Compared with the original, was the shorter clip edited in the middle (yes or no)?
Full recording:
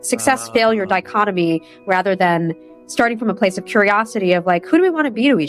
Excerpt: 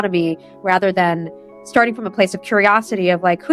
no